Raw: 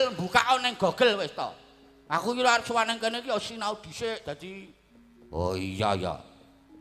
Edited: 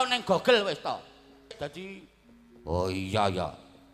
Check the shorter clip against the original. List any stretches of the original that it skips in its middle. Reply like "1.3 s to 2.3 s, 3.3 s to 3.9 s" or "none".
2.0 s to 4.2 s